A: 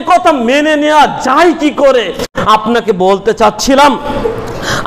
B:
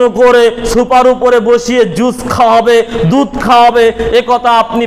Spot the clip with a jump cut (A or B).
A